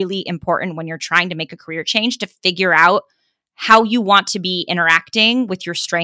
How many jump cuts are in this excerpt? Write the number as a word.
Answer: zero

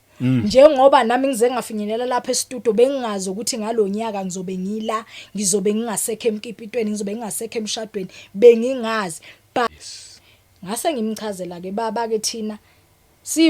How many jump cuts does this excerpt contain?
one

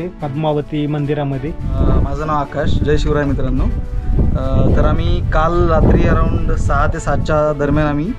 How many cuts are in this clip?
one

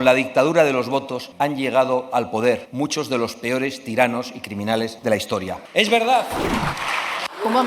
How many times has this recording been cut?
three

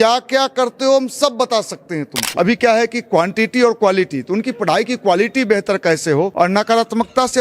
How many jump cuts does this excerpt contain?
two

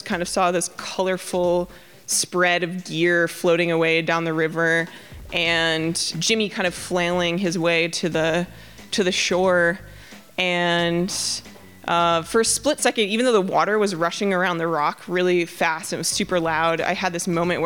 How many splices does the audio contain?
one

